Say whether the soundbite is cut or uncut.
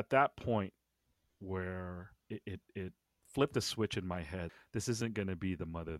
cut